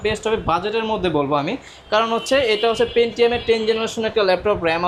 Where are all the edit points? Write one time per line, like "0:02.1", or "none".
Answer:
none